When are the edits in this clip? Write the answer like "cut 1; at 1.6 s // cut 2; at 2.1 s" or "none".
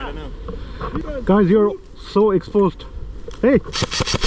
cut 1; at 1.0 s